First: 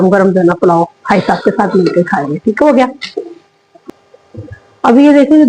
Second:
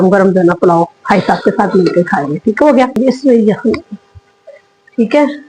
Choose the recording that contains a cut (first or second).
second